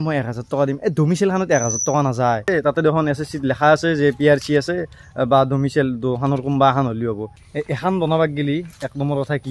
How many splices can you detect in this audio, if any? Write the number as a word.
two